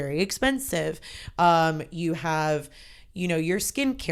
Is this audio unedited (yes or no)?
yes